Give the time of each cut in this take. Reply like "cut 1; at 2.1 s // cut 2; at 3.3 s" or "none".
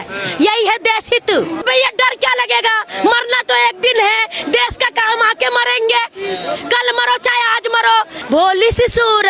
cut 1; at 1.6 s // cut 2; at 8.2 s